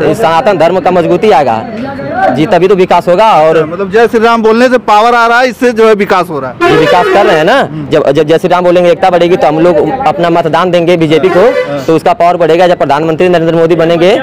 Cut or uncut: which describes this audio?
uncut